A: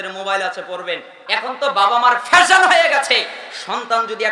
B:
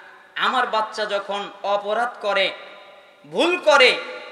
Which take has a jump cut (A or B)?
A